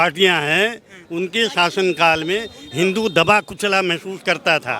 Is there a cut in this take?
no; 0 cuts

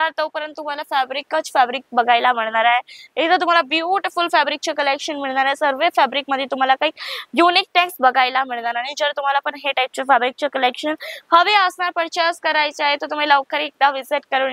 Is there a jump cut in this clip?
no; 0 cuts

